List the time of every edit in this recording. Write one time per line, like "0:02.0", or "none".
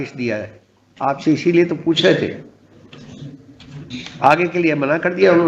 0:03.9